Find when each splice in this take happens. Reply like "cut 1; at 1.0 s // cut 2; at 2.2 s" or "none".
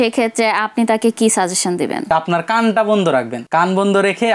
cut 1; at 2.1 s // cut 2; at 3.4 s